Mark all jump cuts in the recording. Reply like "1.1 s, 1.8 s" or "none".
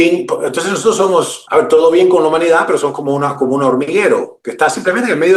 1.4 s